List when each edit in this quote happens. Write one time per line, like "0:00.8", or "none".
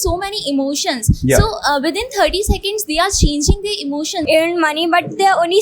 0:04.2